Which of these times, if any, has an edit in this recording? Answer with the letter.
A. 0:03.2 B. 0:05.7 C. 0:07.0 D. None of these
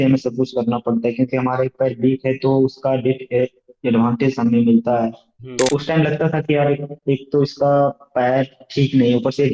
B